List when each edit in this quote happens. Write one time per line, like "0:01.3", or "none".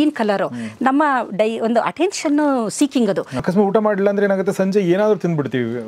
0:03.3